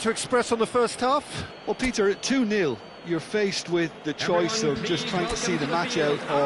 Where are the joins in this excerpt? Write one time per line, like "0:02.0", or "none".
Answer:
0:01.4